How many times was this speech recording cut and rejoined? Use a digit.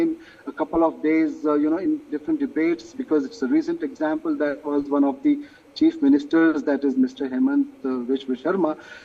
0